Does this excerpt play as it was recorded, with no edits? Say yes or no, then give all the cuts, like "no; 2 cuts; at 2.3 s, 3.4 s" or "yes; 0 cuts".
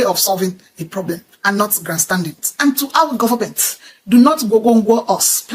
no; 1 cut; at 2.4 s